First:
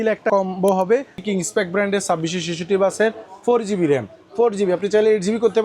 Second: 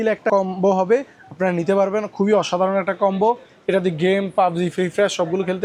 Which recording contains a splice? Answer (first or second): first